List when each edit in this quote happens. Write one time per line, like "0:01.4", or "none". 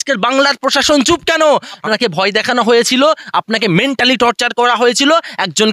0:01.7